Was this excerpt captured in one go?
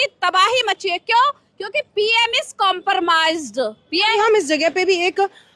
no; 1 cut; at 4.1 s

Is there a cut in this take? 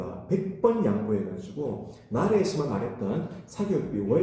no; 0 cuts

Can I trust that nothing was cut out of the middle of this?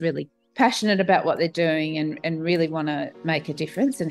no; 1 cut; at 3.2 s

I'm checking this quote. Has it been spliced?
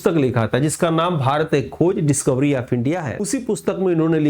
yes; 1 cut; at 3.2 s

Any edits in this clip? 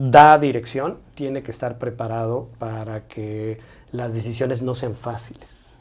no; 0 cuts

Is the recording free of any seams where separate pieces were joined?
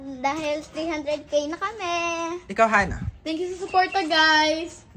yes; 0 cuts

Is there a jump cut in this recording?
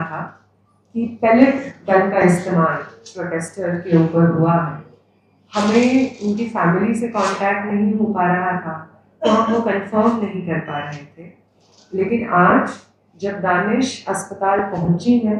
no; 0 cuts

